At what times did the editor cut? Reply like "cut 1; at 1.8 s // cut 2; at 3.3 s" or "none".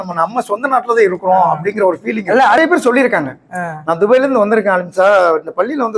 cut 1; at 2.6 s